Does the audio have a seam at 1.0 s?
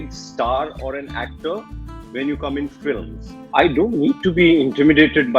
no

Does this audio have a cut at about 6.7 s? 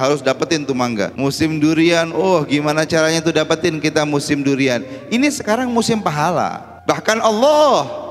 yes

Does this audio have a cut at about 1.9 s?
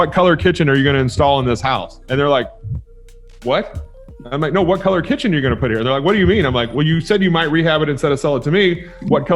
yes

